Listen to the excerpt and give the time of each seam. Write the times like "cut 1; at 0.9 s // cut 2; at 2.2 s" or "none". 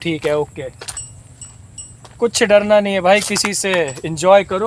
none